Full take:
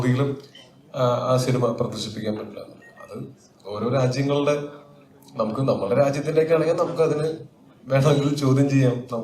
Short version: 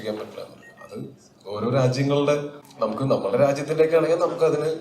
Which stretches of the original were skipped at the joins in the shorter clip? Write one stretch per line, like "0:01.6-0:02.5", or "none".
0:04.8-0:05.2